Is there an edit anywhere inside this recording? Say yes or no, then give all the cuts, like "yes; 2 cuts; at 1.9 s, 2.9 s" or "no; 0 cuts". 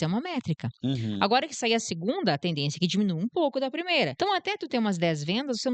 yes; 1 cut; at 4.1 s